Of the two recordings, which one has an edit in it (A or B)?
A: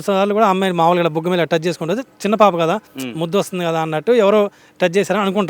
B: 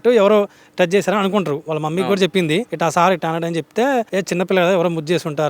B